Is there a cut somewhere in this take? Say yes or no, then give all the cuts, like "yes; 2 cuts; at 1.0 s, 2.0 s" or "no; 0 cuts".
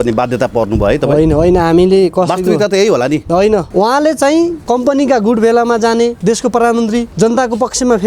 yes; 4 cuts; at 3.7 s, 4.6 s, 6.2 s, 7.1 s